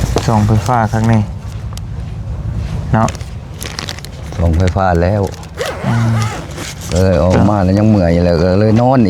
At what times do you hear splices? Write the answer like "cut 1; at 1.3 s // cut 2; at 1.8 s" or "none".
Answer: none